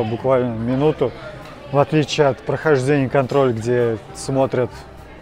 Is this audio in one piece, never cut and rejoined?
yes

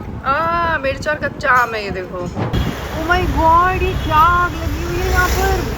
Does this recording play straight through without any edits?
no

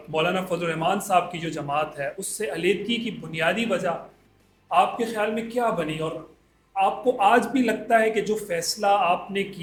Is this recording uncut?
yes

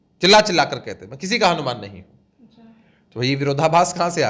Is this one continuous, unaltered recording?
yes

